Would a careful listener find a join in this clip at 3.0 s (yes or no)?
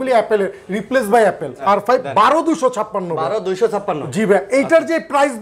no